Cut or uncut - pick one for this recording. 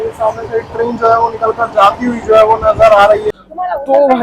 cut